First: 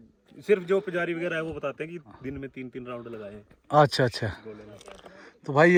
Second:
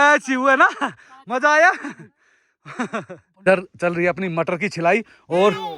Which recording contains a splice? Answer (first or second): second